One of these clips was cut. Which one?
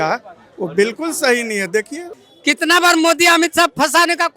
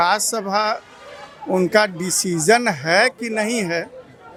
first; 1 cut; at 2.1 s

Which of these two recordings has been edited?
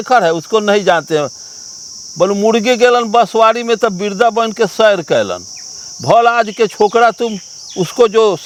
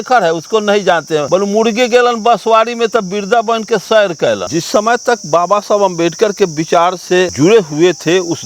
second; 3 cuts; at 1.3 s, 4.5 s, 7.3 s

